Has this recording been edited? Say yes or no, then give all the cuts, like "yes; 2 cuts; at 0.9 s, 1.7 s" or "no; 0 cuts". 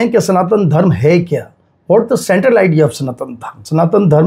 no; 0 cuts